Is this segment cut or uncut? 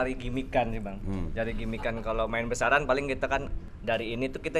cut